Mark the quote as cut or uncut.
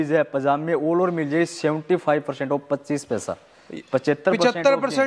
uncut